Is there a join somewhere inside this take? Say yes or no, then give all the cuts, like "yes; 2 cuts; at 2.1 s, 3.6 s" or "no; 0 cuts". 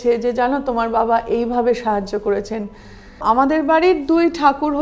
yes; 1 cut; at 3.2 s